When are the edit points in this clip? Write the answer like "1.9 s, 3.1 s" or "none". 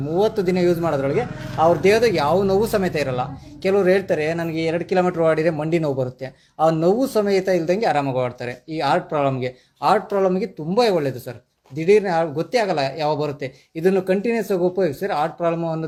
none